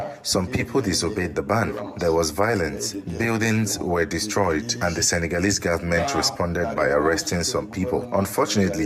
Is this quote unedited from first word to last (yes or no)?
yes